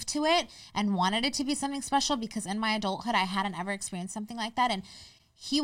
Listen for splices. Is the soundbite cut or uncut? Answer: uncut